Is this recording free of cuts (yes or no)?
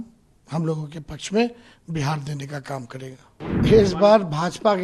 no